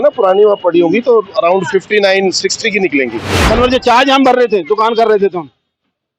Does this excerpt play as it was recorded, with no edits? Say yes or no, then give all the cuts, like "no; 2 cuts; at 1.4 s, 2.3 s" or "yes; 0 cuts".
no; 1 cut; at 3.3 s